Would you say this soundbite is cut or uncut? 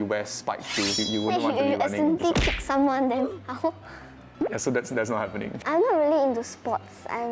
cut